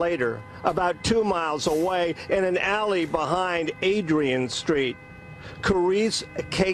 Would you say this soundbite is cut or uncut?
uncut